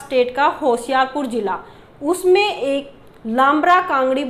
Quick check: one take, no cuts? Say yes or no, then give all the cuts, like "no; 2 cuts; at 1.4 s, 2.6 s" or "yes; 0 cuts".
yes; 0 cuts